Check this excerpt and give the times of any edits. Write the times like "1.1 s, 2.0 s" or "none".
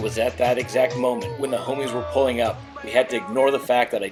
none